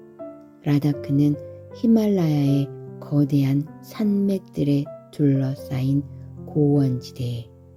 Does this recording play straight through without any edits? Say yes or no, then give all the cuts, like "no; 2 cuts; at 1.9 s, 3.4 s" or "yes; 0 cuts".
yes; 0 cuts